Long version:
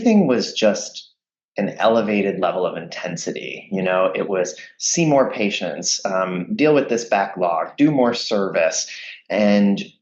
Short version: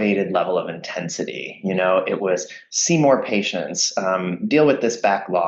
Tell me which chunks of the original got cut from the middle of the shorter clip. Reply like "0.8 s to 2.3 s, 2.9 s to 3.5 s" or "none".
none